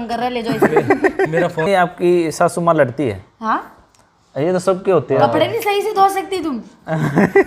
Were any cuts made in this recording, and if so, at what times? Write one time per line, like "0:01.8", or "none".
0:01.7